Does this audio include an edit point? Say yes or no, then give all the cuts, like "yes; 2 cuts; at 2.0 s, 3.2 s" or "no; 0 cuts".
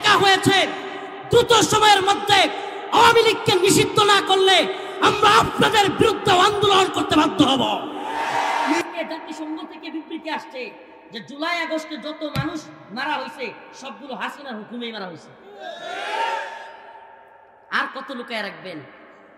yes; 1 cut; at 8.8 s